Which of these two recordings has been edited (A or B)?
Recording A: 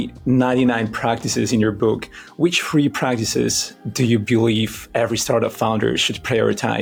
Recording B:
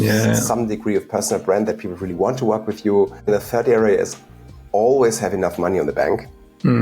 B